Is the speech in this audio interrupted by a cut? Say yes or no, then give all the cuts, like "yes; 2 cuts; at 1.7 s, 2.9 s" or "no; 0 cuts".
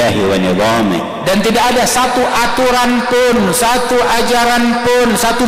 no; 0 cuts